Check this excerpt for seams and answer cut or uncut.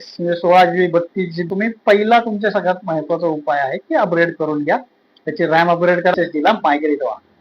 cut